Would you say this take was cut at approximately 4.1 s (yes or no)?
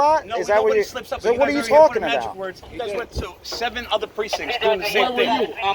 no